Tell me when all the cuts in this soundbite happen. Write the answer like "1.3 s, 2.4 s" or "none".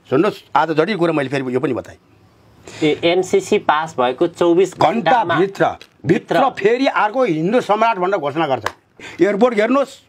9.1 s